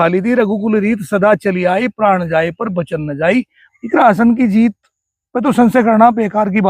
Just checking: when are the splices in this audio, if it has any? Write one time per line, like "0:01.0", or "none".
0:03.6